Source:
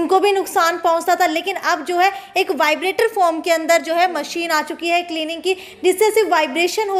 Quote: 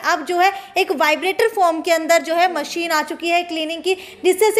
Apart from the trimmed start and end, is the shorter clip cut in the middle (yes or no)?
no